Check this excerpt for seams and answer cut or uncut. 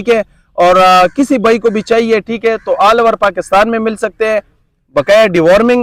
uncut